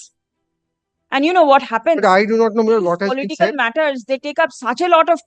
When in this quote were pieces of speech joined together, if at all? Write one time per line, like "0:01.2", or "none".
none